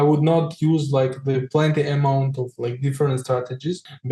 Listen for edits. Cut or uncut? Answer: uncut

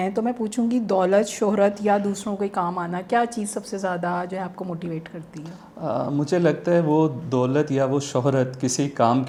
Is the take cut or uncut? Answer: uncut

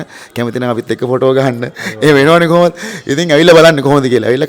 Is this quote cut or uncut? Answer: uncut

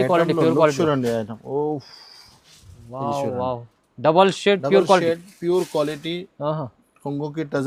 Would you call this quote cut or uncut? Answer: uncut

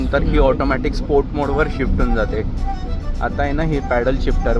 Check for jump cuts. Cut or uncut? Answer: uncut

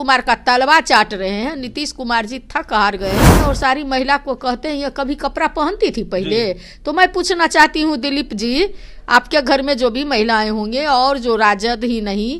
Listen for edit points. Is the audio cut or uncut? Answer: cut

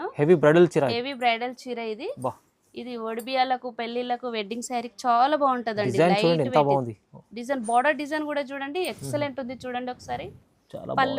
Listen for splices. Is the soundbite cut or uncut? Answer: uncut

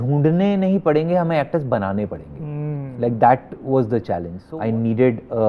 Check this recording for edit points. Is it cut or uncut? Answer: cut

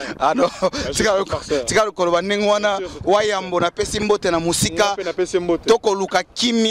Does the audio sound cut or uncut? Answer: uncut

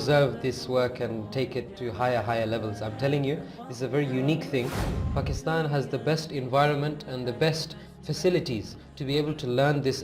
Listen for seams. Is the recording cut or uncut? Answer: cut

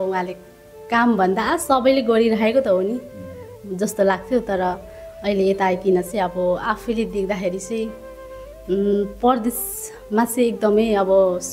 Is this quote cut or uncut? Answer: uncut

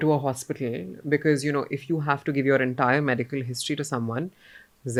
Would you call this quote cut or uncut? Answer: uncut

